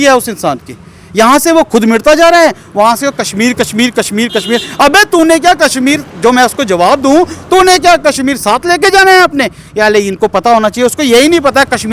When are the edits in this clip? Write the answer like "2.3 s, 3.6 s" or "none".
none